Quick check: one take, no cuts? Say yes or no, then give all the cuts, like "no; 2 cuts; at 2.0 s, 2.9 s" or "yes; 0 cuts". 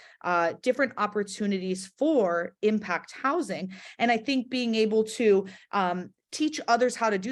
yes; 0 cuts